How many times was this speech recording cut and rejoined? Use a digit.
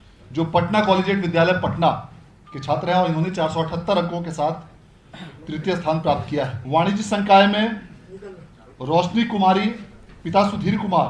1